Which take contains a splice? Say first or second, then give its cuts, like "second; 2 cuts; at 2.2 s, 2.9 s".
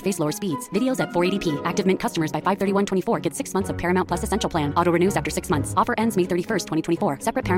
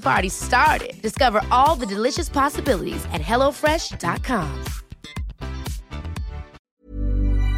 second; 1 cut; at 6.6 s